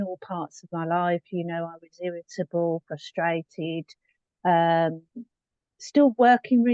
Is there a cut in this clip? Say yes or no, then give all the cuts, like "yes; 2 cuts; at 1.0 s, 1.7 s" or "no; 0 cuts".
no; 0 cuts